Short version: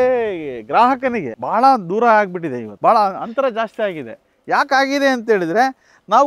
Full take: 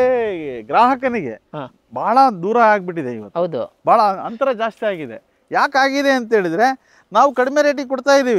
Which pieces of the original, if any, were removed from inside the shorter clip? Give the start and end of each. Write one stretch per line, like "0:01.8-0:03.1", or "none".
0:01.3-0:01.9
0:03.2-0:03.7